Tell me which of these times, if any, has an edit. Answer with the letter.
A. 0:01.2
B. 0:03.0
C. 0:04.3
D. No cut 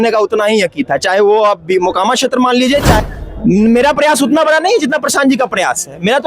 B